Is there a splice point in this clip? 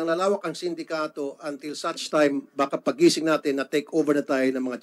no; 0 cuts

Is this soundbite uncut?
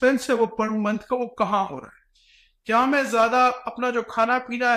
yes; 0 cuts

